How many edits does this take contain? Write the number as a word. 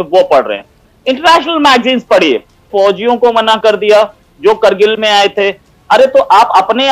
one